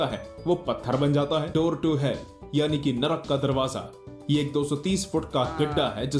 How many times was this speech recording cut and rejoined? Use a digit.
1